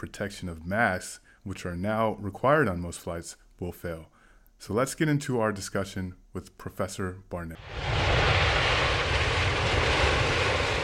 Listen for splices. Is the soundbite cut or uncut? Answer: cut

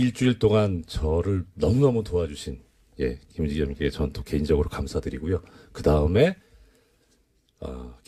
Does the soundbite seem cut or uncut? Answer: uncut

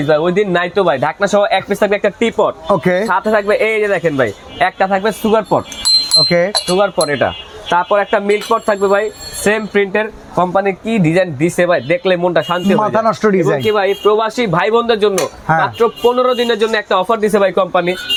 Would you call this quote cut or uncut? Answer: uncut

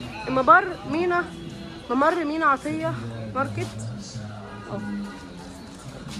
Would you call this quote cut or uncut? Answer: uncut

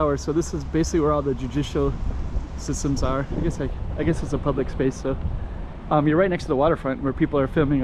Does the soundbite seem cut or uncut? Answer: uncut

